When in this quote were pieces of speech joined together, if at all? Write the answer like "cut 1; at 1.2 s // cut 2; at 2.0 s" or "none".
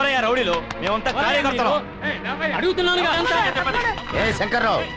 cut 1; at 3.1 s